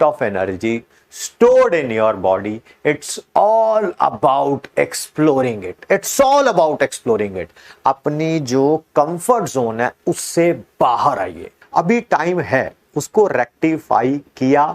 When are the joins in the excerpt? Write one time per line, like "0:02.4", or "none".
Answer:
0:11.6